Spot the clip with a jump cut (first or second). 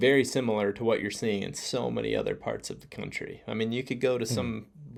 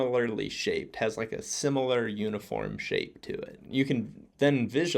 second